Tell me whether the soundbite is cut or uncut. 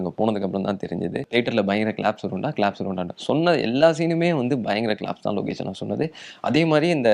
cut